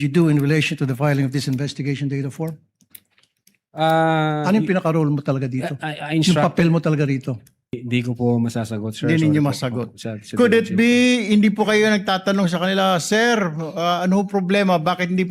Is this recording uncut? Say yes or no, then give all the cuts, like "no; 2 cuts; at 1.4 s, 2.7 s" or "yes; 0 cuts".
no; 1 cut; at 7.8 s